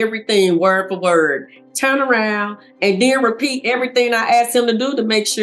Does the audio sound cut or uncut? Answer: uncut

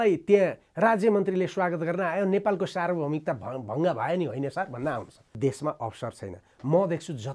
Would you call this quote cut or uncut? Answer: cut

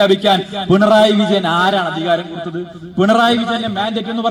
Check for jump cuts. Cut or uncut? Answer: uncut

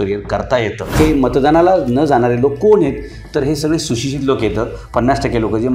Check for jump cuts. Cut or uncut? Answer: cut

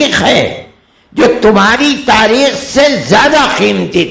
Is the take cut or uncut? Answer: uncut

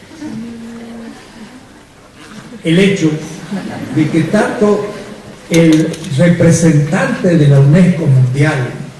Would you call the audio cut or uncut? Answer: cut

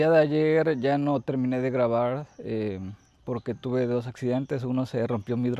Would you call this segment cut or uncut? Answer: uncut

